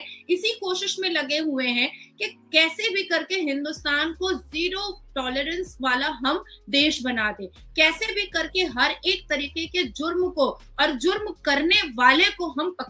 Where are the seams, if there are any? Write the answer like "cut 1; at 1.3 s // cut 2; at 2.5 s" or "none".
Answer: none

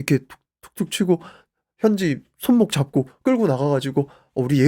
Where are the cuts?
none

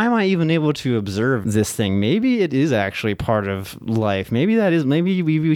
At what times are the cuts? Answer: cut 1; at 1.4 s

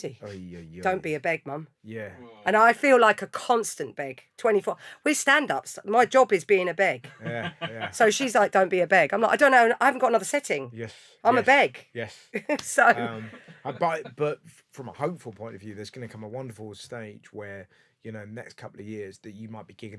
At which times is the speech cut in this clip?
none

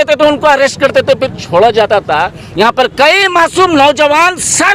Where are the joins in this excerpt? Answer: none

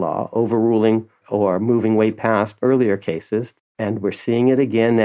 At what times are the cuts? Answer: cut 1; at 1.2 s // cut 2; at 2.5 s // cut 3; at 3.6 s

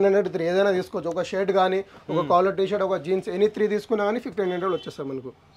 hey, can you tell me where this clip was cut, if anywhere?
none

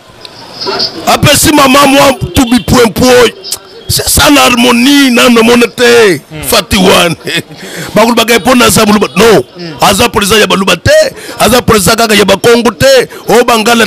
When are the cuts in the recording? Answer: none

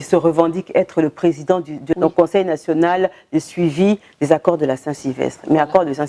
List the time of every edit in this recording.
cut 1; at 2.0 s

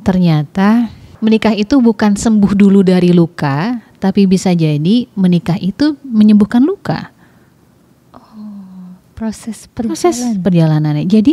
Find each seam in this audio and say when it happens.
cut 1; at 1.0 s

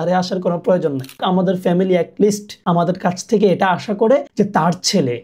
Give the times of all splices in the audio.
cut 1; at 1.2 s // cut 2; at 2.5 s // cut 3; at 4.3 s

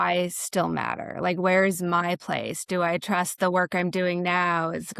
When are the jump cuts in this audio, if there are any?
none

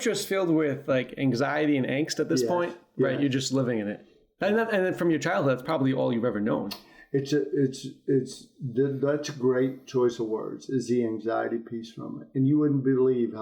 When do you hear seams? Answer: none

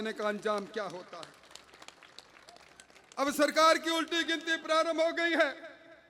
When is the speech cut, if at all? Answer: none

